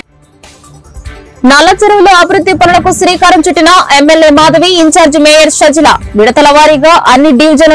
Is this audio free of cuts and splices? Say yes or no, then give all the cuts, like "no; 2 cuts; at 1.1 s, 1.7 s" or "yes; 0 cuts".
yes; 0 cuts